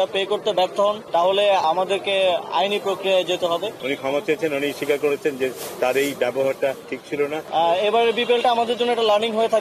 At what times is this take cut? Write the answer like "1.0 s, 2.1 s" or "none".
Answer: 1.6 s, 3.7 s, 7.1 s